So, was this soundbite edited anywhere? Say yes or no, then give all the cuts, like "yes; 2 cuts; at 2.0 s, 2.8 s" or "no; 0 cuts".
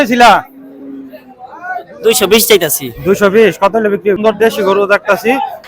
yes; 1 cut; at 4.2 s